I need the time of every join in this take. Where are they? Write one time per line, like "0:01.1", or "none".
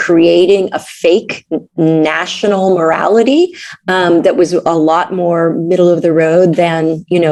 none